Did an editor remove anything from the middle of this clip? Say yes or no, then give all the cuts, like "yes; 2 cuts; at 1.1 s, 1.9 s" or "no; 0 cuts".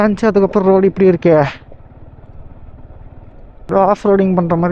yes; 1 cut; at 3.6 s